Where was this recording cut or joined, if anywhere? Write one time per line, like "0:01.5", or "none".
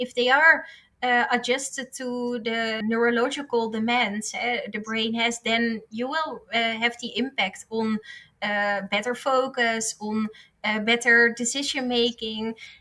0:02.8